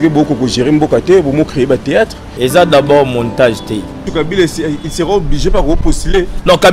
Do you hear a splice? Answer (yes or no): yes